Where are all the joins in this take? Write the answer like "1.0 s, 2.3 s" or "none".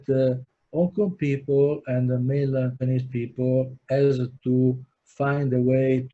none